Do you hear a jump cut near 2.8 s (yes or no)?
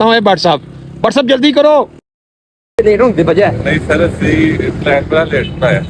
yes